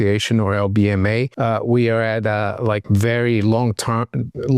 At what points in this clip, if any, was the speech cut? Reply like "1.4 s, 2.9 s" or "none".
2.8 s